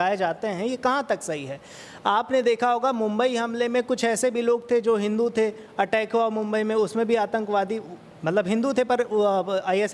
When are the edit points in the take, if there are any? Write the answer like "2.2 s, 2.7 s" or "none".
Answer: none